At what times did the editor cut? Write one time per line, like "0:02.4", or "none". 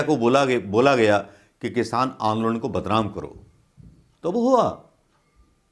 none